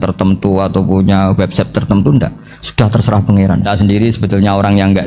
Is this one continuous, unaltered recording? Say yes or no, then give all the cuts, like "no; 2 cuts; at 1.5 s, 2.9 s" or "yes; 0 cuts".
no; 1 cut; at 3.6 s